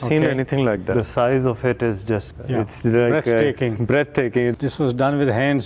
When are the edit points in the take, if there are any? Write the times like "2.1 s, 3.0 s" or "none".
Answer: 0.9 s, 2.3 s, 4.5 s